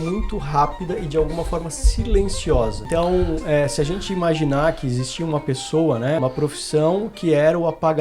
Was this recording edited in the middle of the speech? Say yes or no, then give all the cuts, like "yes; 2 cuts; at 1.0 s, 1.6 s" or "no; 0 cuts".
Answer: yes; 2 cuts; at 2.8 s, 6.2 s